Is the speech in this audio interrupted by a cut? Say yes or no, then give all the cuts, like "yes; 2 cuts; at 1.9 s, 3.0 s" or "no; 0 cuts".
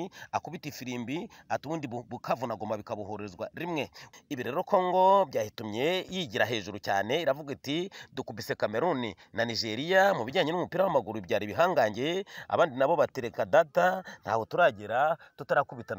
yes; 1 cut; at 4.0 s